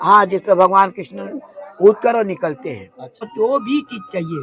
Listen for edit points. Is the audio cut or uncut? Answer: cut